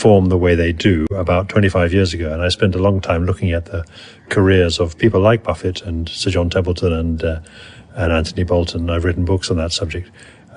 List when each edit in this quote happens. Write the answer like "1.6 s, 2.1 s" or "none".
1.0 s